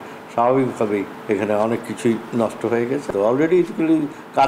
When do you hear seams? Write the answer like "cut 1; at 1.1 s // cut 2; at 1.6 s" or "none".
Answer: cut 1; at 1.1 s // cut 2; at 3.1 s